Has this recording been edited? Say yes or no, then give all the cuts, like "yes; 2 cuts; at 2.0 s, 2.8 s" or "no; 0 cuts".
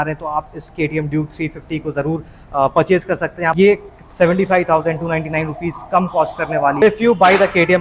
yes; 2 cuts; at 3.5 s, 6.8 s